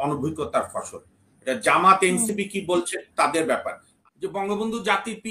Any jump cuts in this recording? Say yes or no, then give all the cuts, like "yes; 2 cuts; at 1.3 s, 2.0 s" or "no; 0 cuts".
yes; 1 cut; at 4.0 s